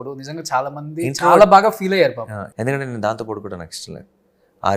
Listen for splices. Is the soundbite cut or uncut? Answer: cut